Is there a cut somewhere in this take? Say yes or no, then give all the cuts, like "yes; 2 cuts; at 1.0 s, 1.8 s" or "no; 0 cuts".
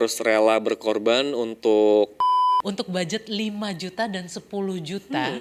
yes; 1 cut; at 2.6 s